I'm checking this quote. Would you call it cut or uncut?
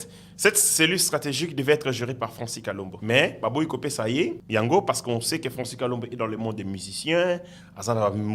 cut